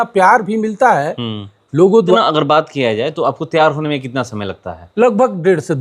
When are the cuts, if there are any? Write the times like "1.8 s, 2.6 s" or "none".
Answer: 2.2 s

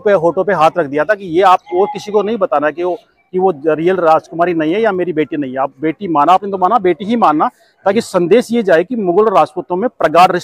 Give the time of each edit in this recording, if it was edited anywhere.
none

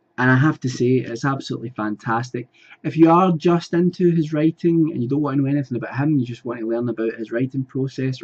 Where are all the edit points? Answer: none

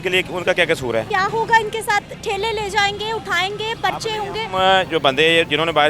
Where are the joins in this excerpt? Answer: 1.1 s

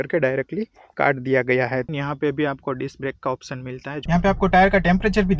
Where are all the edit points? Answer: 1.9 s, 4.0 s

